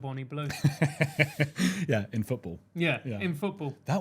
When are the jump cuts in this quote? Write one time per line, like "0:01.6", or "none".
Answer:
none